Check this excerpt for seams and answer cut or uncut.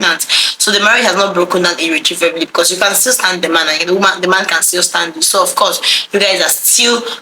uncut